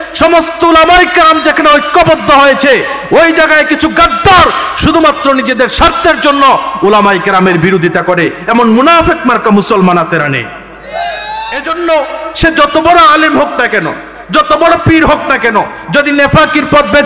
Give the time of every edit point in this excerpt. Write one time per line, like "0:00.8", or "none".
0:11.6